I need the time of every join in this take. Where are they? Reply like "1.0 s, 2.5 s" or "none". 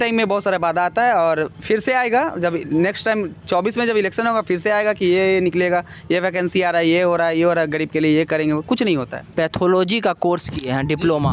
none